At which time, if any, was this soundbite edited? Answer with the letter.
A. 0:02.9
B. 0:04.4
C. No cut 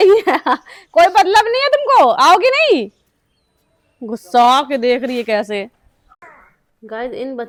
C